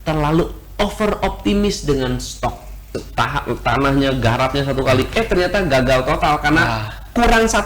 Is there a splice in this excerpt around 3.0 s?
yes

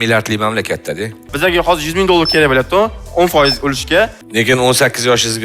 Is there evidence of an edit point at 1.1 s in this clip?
yes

